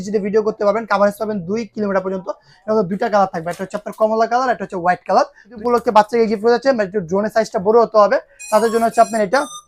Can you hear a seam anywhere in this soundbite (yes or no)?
yes